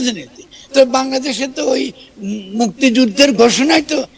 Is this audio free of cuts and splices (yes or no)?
yes